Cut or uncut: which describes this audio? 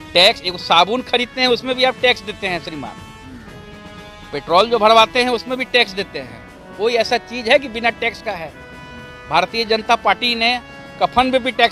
uncut